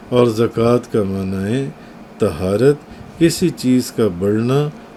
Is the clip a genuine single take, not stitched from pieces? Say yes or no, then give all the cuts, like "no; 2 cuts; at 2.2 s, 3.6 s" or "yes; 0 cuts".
yes; 0 cuts